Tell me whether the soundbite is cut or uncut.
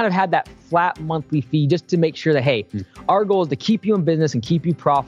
uncut